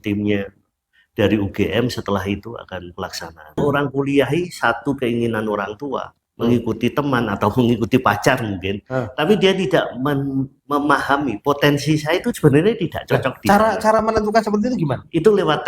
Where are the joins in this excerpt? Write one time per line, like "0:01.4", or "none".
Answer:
0:03.6